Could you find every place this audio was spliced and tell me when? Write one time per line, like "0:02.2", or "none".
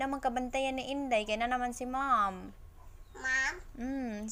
none